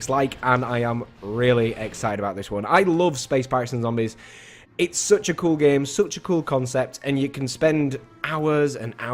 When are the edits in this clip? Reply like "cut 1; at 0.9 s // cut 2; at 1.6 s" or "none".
none